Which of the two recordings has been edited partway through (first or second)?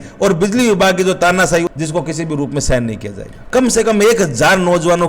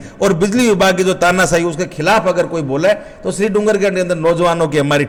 first